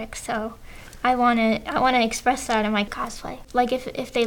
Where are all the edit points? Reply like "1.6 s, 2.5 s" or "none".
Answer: 2.9 s